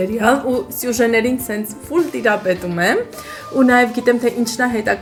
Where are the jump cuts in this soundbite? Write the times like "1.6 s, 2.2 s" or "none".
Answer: none